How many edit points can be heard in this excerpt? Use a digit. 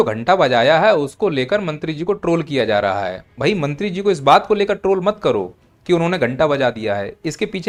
0